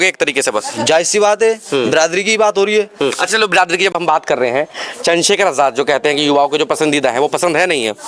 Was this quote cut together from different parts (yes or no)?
no